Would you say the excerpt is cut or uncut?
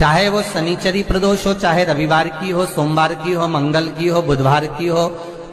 uncut